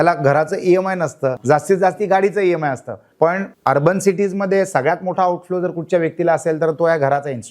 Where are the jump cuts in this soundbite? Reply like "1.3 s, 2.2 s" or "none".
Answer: 1.4 s, 3.2 s